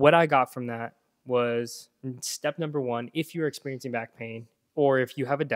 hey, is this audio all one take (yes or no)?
yes